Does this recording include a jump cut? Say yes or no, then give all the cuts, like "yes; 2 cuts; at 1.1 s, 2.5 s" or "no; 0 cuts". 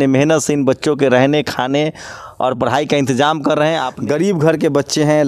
yes; 1 cut; at 3.9 s